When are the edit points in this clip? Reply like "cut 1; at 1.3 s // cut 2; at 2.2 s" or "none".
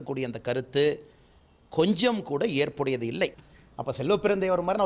cut 1; at 3.3 s